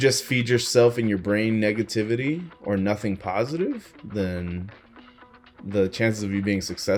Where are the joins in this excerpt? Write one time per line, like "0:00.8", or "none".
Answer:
none